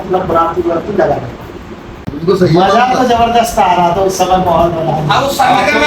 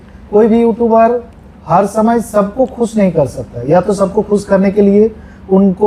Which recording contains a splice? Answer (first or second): first